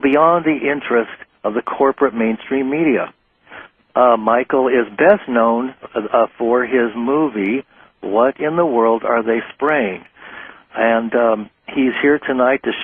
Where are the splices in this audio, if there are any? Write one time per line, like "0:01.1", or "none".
0:05.8